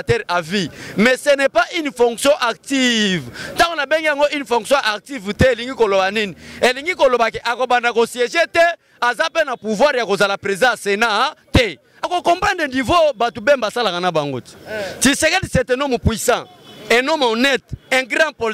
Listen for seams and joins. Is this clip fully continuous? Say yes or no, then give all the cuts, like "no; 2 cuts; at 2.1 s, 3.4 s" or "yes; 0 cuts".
no; 1 cut; at 12.0 s